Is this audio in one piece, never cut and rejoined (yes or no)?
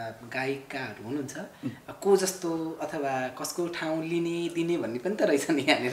yes